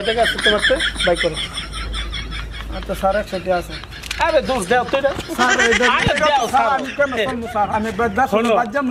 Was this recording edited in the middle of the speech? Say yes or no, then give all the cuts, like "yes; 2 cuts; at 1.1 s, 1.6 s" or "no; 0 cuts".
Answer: no; 0 cuts